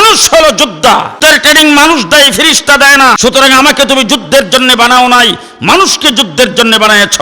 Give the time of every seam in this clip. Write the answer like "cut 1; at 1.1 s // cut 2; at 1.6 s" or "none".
cut 1; at 1.1 s // cut 2; at 3.2 s